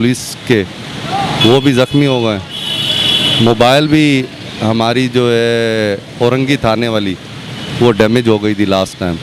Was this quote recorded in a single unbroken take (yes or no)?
yes